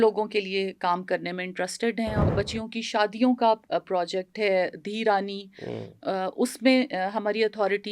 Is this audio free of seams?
no; 1 cut; at 2.2 s

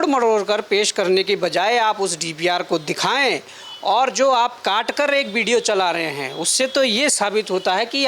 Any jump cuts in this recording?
no; 0 cuts

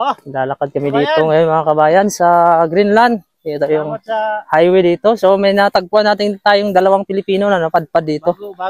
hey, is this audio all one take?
yes; 0 cuts

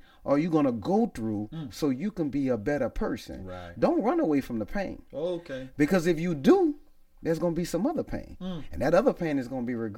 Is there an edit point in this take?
no; 0 cuts

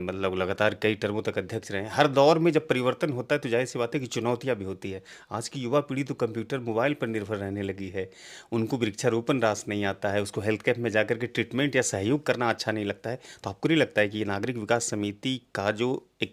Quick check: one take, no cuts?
yes; 0 cuts

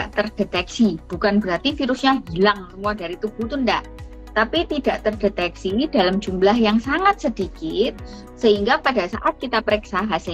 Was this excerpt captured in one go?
yes; 0 cuts

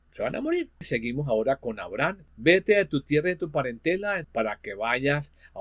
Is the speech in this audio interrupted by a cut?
yes; 3 cuts; at 0.9 s, 2.2 s, 4.2 s

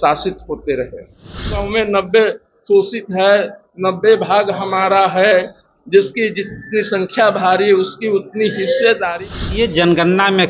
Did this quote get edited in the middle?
yes; 2 cuts; at 1.6 s, 9.2 s

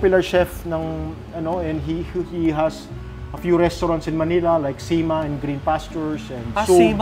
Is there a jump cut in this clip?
no; 0 cuts

